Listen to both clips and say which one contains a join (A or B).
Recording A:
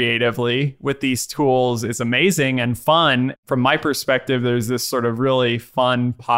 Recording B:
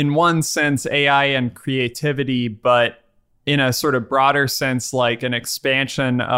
A